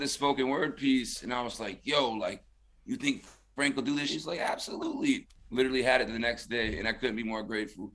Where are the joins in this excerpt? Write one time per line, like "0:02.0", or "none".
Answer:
0:04.1